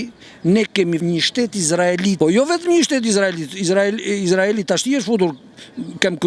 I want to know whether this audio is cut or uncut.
cut